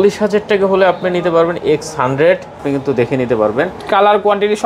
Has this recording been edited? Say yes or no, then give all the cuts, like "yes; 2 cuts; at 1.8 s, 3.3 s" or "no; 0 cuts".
yes; 1 cut; at 2.6 s